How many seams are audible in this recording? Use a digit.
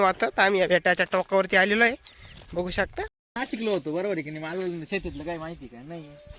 1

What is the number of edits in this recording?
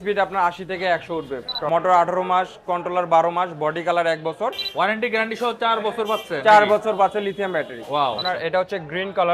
3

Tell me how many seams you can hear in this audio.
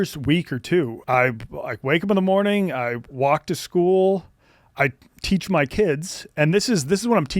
1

